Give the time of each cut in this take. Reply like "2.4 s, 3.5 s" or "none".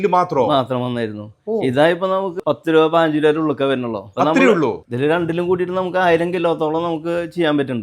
2.4 s, 4.8 s